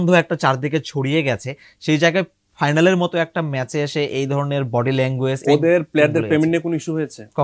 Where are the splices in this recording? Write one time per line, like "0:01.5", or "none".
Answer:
0:05.4